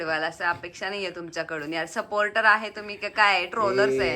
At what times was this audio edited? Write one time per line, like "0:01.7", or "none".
none